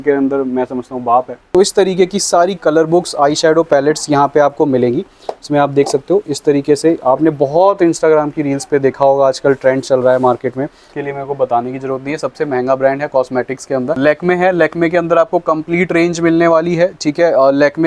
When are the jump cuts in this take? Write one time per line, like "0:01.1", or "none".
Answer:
0:01.4
0:10.9
0:14.0